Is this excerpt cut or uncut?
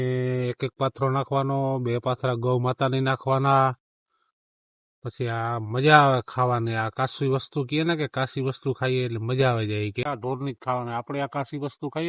cut